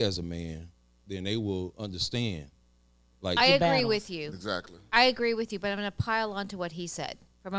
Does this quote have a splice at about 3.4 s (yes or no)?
yes